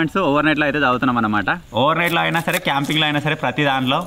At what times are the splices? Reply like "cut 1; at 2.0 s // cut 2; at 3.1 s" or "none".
cut 1; at 1.6 s